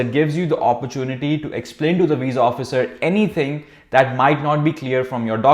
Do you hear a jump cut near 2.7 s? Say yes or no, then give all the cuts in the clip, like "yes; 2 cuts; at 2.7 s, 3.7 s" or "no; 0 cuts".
no; 0 cuts